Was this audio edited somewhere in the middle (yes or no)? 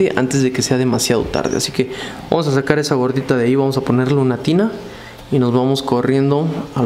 no